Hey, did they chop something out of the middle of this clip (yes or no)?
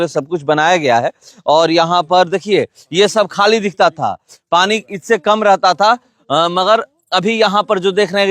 no